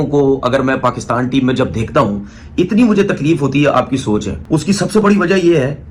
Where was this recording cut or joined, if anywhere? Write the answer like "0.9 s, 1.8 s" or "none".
4.3 s

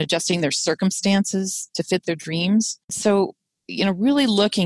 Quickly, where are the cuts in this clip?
2.9 s

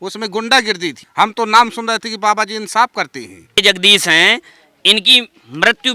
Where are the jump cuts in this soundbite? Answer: 1.0 s, 3.6 s

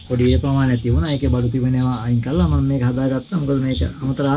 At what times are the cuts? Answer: none

